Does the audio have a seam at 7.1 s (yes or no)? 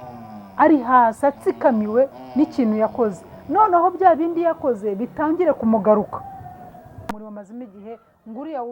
yes